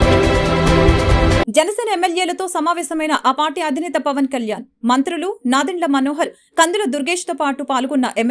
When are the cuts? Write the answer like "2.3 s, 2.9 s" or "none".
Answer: 1.4 s